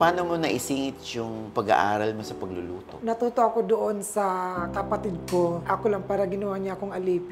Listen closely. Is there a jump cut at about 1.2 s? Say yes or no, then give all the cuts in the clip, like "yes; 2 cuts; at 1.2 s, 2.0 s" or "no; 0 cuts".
no; 2 cuts; at 2.9 s, 5.6 s